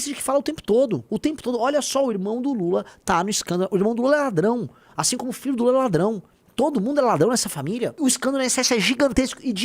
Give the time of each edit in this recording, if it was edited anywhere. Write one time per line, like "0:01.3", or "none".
0:01.1
0:07.9